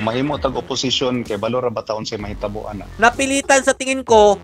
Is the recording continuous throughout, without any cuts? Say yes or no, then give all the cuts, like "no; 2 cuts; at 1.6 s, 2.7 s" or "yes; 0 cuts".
no; 1 cut; at 2.9 s